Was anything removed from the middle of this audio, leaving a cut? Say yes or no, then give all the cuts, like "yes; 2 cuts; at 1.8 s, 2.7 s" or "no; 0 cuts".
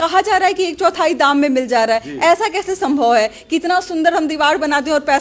no; 0 cuts